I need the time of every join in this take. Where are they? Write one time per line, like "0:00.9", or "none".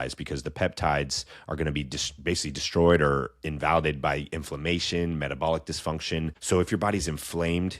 0:06.4